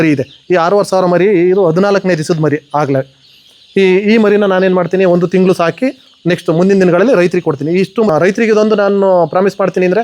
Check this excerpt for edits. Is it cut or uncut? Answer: cut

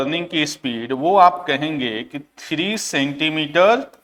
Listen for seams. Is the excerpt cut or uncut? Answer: uncut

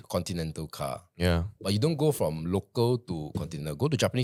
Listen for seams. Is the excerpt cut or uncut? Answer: uncut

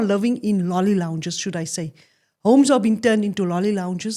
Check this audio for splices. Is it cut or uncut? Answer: uncut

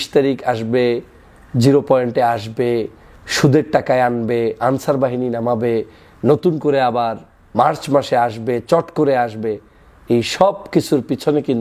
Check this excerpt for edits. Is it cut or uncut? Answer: uncut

